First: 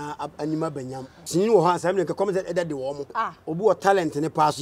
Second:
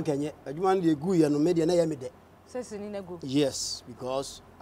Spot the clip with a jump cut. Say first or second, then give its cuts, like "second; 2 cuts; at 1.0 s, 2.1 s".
first; 2 cuts; at 1.2 s, 3.0 s